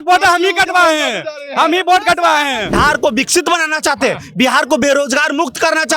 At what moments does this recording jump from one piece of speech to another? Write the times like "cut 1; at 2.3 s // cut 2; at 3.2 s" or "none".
cut 1; at 2.7 s